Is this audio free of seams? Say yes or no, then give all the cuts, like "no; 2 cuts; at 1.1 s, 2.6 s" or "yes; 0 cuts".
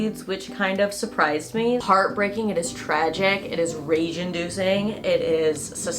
no; 1 cut; at 1.8 s